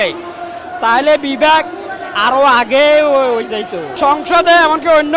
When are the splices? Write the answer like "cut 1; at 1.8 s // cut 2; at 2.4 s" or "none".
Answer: cut 1; at 3.9 s